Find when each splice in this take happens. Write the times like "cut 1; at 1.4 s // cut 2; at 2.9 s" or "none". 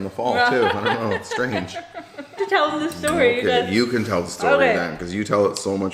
cut 1; at 2.4 s